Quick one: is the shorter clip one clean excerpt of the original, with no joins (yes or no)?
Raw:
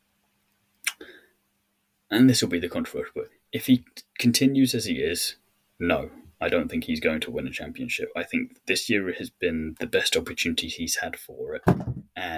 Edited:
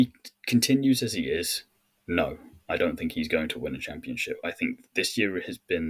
yes